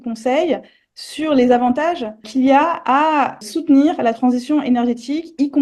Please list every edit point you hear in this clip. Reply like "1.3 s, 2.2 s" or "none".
2.3 s, 3.4 s